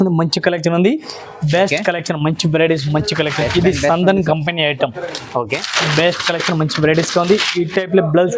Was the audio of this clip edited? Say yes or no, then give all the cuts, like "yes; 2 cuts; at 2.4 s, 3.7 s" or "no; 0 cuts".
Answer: no; 0 cuts